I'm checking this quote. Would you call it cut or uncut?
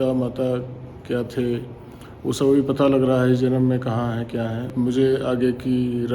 cut